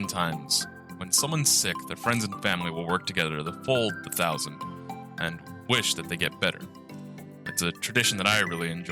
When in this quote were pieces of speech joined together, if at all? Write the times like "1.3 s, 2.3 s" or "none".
none